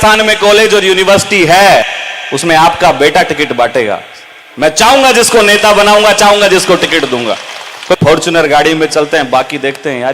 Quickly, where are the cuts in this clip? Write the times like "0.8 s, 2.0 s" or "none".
8.0 s